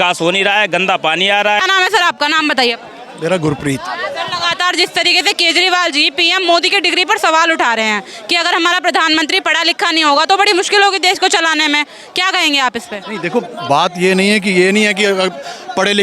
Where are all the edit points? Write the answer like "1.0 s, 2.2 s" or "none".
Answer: 1.6 s